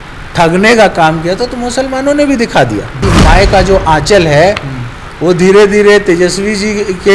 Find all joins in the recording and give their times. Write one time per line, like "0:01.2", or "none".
0:03.0